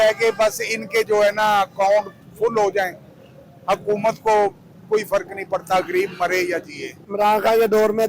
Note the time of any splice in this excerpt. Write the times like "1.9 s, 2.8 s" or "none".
7.0 s